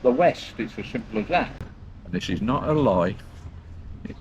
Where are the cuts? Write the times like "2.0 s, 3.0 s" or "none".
1.6 s